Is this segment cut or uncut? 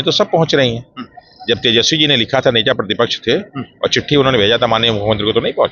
uncut